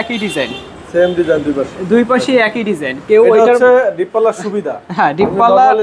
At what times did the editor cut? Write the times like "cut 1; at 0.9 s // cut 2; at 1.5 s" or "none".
none